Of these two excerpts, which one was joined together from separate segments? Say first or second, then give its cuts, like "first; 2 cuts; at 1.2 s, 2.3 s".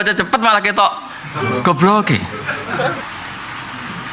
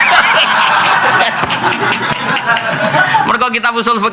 first; 1 cut; at 3.0 s